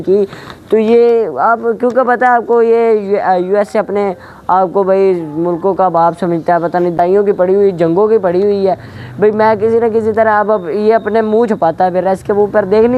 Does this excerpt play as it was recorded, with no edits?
no; 1 cut; at 7.0 s

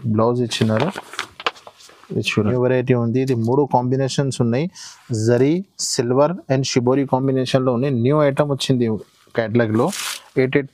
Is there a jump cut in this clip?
yes; 1 cut; at 2.4 s

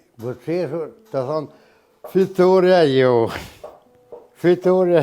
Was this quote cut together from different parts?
no; 0 cuts

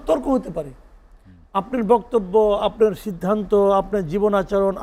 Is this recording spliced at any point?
no; 0 cuts

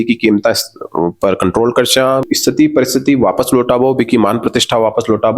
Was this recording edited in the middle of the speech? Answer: yes; 1 cut; at 2.3 s

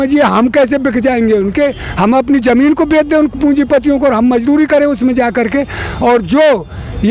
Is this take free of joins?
yes; 0 cuts

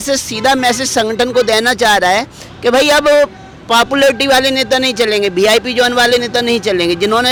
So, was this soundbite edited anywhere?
no; 0 cuts

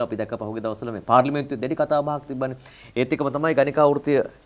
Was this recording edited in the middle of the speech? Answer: no; 0 cuts

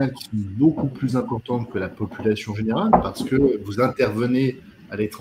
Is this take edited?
no; 0 cuts

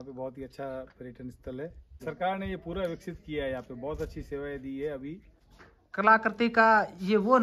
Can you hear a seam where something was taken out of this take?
yes; 2 cuts; at 1.9 s, 5.7 s

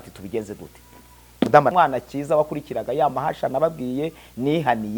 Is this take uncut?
no; 1 cut; at 1.7 s

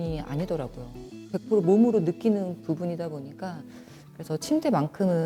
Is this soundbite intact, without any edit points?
yes; 0 cuts

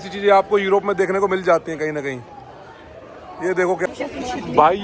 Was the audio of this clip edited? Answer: yes; 1 cut; at 3.8 s

